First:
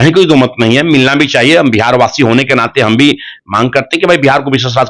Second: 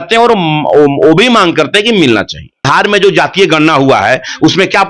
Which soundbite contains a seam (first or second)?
second